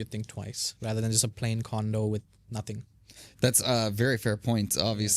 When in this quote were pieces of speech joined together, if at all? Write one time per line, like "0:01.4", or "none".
none